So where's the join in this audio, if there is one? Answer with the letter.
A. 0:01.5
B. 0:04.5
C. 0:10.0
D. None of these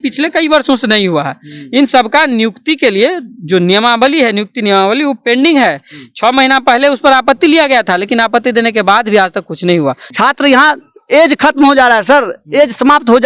C